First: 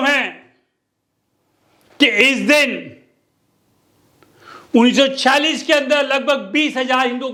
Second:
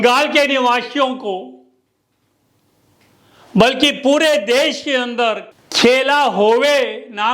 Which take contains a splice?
second; 1 cut; at 5.5 s

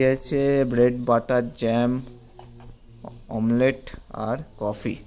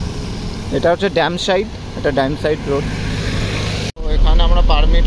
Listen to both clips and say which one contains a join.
second; 1 cut; at 3.9 s

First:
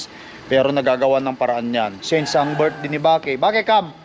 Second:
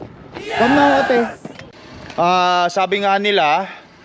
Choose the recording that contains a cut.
second; 1 cut; at 1.6 s

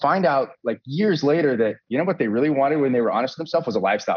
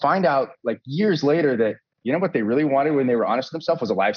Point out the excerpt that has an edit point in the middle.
first; 1 cut; at 1.8 s

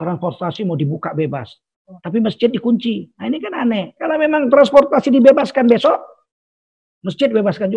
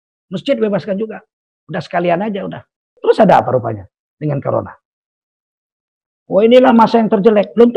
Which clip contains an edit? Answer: second; 1 cut; at 2.9 s

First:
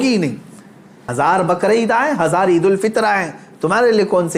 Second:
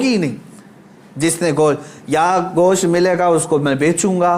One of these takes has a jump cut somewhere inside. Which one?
first; 1 cut; at 1.1 s

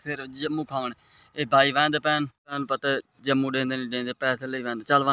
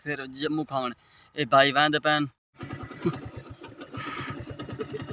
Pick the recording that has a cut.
second; 1 cut; at 2.4 s

